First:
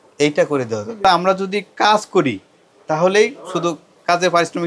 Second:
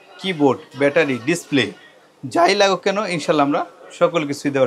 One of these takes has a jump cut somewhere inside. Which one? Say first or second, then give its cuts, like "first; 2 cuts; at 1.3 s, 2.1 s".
first; 1 cut; at 1.0 s